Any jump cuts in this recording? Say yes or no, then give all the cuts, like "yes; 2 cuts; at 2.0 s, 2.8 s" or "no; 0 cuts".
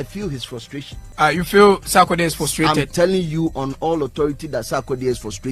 yes; 1 cut; at 1.0 s